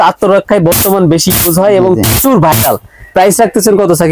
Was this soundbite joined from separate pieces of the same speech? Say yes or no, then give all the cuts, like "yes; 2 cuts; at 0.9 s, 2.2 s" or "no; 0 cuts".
no; 0 cuts